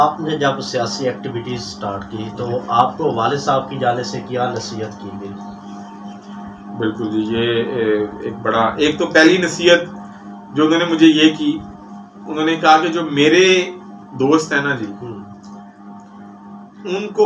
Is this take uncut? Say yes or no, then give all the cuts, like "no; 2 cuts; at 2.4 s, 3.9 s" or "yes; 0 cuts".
yes; 0 cuts